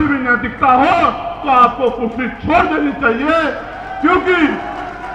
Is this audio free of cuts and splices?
yes; 0 cuts

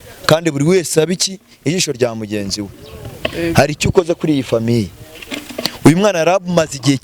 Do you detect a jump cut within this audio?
no; 0 cuts

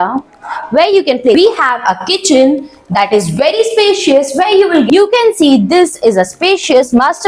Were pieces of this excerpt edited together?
yes; 2 cuts; at 1.3 s, 4.9 s

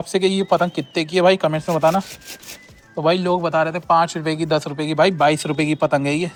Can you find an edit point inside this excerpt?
no; 0 cuts

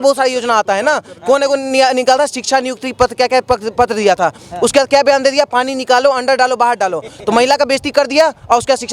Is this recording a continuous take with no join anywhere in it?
yes; 0 cuts

